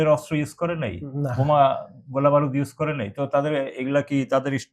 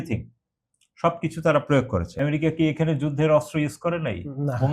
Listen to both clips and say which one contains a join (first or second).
second